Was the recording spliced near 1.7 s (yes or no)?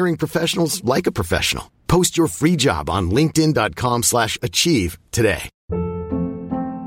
no